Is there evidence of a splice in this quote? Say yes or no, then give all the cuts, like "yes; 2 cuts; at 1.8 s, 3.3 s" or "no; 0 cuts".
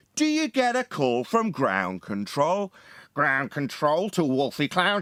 no; 0 cuts